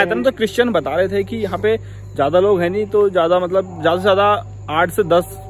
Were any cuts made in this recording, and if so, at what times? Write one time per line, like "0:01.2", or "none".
none

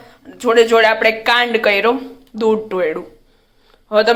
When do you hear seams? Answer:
none

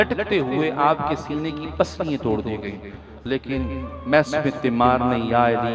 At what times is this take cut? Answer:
none

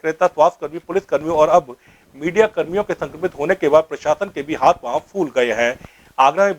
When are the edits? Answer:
0:04.5

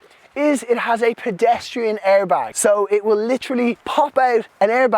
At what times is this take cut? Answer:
0:02.5
0:04.0

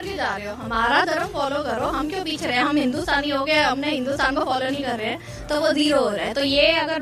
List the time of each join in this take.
none

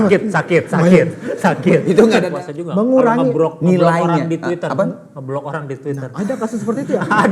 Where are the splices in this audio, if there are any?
0:02.3

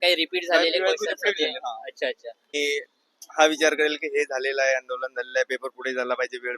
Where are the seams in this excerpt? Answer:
0:02.5

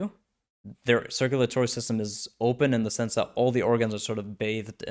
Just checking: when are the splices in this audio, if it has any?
none

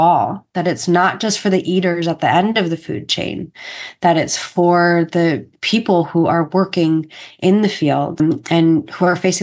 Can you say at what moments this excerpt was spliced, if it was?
0:05.5
0:08.2

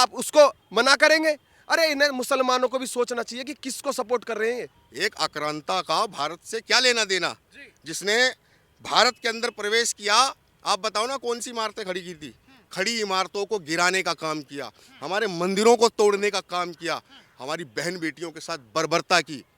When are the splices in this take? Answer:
0:04.8

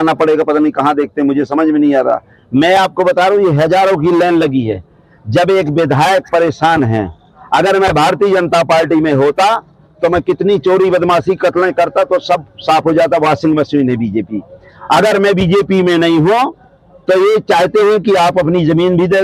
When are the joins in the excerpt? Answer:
none

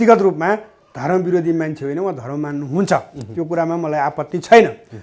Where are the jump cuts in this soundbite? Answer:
none

